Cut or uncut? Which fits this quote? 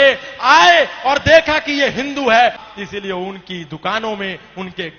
cut